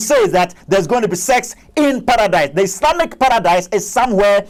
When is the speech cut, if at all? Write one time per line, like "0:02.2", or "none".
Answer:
none